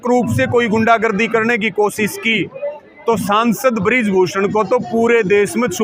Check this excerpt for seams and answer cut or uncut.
uncut